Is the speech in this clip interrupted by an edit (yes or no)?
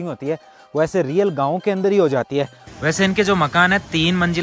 yes